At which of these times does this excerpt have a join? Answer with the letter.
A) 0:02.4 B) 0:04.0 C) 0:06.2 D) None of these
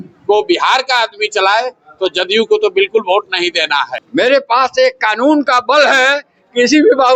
B